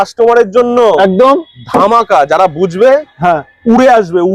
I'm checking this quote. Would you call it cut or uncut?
uncut